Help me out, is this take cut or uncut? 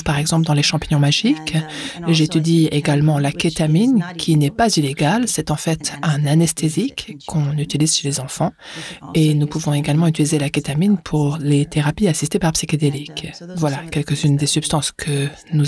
uncut